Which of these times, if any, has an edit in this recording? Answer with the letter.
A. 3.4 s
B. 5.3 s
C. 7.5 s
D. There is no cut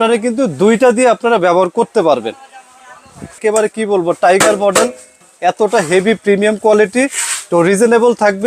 A